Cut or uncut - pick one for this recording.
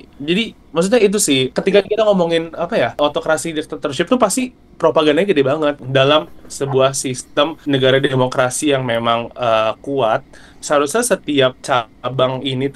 cut